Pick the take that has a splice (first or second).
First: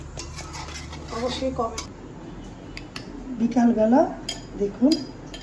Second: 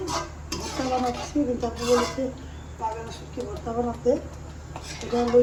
first